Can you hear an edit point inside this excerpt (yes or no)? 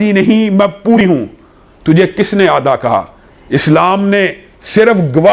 yes